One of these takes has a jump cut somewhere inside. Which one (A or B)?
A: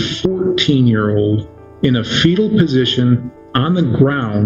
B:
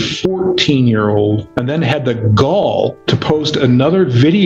B